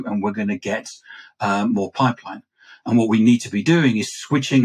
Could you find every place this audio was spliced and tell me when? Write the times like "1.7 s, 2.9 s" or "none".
none

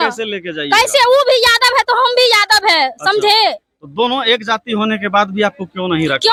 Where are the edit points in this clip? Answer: none

